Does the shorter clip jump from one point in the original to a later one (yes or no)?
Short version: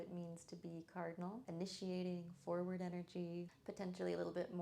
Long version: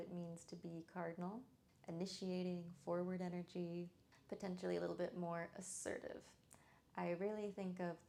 yes